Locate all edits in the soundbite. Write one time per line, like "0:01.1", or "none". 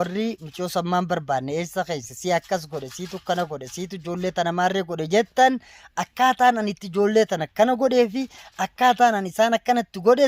none